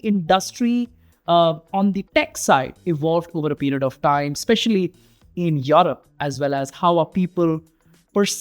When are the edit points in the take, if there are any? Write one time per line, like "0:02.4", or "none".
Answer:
0:02.0